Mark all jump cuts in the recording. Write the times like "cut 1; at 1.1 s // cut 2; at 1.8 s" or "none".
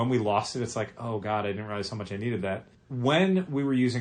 cut 1; at 2.8 s